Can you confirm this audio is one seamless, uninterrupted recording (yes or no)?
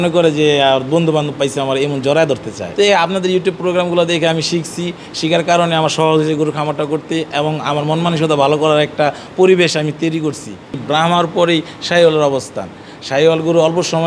no